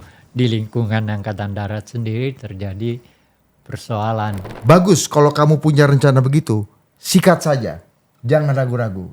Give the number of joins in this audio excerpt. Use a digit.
1